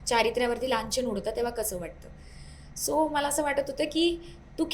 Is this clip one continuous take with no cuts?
yes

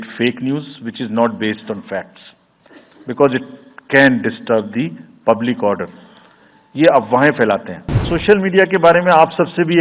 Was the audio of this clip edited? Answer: yes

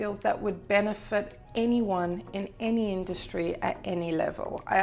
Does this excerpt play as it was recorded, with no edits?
yes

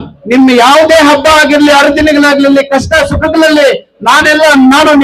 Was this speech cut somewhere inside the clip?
no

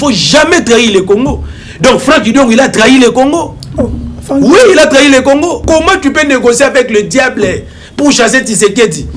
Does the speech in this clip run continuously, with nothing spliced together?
no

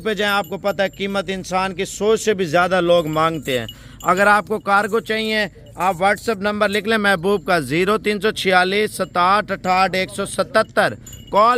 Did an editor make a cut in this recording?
no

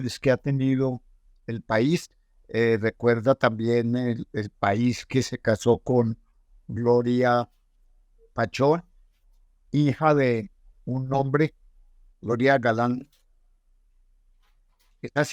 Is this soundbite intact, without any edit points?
yes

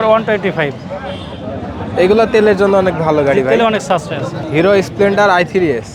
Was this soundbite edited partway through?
yes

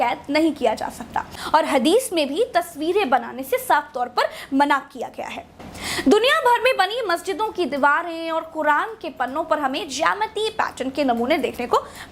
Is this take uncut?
no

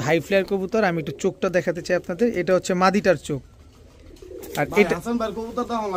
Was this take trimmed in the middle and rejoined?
no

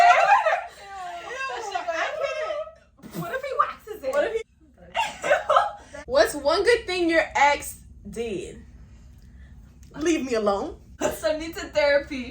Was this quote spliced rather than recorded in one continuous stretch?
yes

